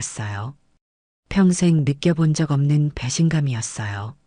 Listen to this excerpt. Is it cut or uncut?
uncut